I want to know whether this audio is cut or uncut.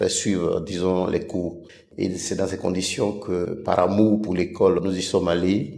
uncut